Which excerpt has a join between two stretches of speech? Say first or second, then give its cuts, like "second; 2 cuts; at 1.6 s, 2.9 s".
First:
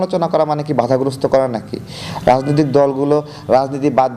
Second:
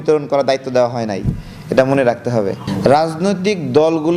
second; 1 cut; at 2.6 s